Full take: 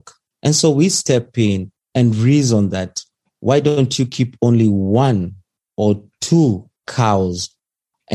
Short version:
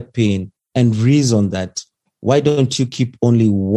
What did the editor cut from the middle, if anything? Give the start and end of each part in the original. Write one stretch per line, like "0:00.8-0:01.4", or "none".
none